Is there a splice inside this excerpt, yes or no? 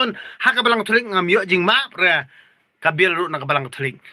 no